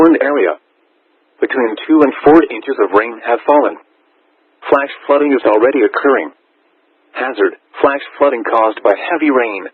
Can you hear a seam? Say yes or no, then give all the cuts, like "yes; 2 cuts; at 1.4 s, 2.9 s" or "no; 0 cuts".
no; 0 cuts